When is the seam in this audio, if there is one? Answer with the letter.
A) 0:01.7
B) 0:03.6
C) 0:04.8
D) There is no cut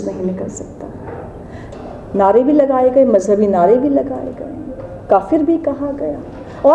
A